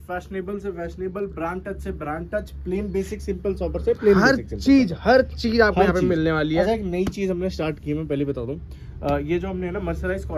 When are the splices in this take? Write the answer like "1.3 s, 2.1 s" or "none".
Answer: none

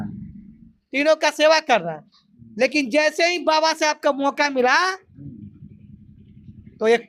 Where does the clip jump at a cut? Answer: none

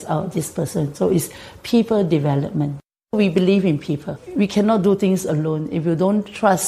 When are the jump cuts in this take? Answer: 3.1 s, 4.2 s

